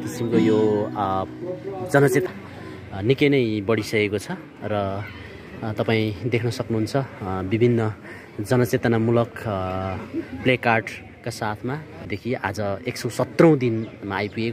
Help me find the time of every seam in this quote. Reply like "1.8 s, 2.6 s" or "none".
2.2 s, 12.0 s